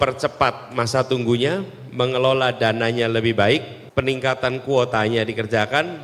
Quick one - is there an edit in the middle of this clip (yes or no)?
yes